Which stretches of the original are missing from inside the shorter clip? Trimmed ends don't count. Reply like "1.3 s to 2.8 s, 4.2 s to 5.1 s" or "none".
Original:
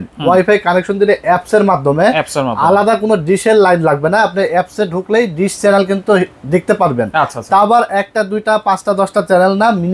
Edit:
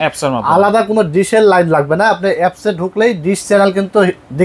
none